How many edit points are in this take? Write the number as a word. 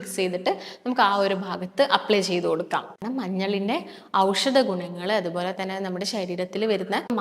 one